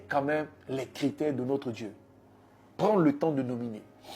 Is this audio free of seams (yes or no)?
yes